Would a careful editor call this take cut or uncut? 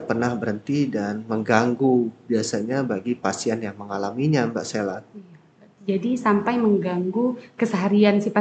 uncut